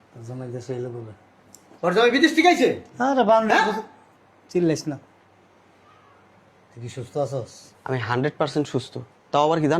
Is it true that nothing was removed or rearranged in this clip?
no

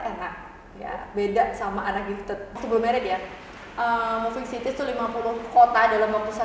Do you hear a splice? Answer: yes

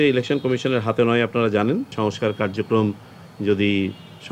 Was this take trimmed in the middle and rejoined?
yes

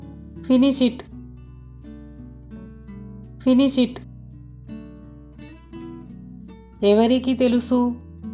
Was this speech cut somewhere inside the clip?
no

